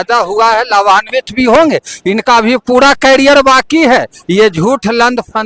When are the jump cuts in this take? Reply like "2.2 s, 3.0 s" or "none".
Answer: none